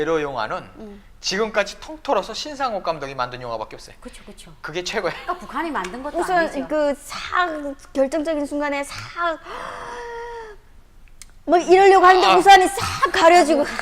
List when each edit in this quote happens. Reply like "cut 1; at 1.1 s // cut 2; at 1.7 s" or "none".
cut 1; at 12.8 s